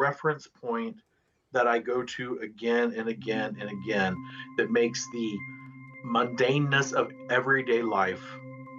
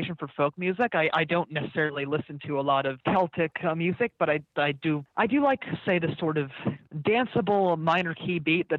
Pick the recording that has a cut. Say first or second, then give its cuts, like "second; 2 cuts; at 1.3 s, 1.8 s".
second; 3 cuts; at 3.0 s, 5.1 s, 6.9 s